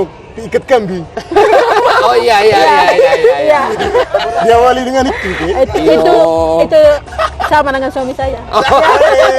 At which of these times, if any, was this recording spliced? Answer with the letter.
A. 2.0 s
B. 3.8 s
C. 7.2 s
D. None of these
B